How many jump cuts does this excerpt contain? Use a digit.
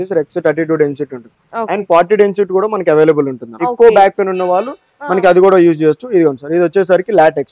1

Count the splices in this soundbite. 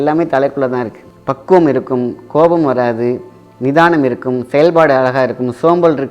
0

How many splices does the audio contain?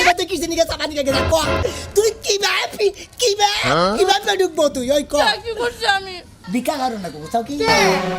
1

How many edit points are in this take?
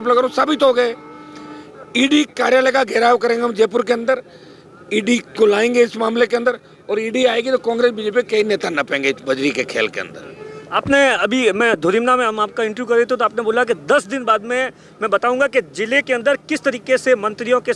0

